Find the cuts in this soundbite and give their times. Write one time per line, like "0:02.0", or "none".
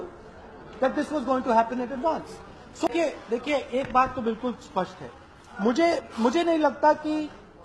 0:02.9